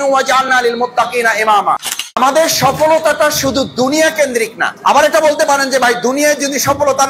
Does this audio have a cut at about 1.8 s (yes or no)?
yes